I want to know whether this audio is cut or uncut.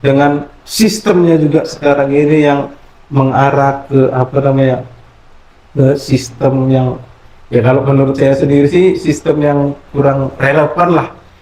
uncut